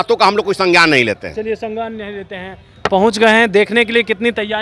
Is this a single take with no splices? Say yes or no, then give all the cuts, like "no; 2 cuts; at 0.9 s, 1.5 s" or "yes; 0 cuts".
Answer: yes; 0 cuts